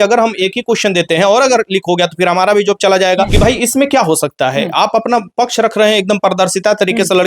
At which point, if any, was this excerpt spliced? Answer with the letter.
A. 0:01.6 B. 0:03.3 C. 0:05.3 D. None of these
B